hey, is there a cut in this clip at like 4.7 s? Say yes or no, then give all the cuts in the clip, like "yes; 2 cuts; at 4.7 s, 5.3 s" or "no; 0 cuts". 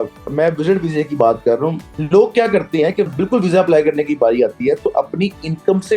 no; 2 cuts; at 1.9 s, 3.1 s